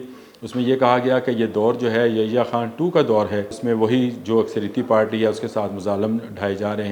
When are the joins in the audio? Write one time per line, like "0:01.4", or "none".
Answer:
0:03.5